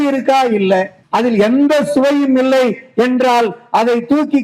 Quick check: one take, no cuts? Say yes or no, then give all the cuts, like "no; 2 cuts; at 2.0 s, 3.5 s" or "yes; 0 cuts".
no; 1 cut; at 1.0 s